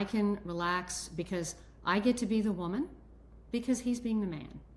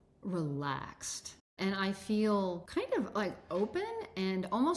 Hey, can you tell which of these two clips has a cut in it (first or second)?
second